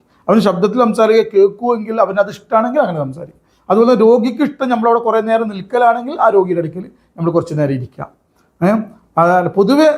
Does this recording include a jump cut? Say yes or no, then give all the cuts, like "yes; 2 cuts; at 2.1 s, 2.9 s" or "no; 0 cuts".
no; 0 cuts